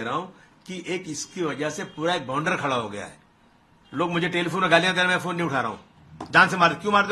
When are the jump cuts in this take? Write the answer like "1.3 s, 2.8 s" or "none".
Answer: none